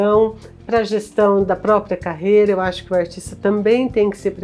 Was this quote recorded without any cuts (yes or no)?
yes